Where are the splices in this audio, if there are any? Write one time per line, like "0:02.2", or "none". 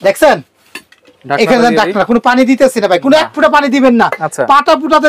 none